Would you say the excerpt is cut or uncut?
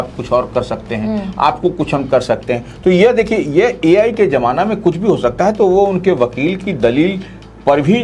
uncut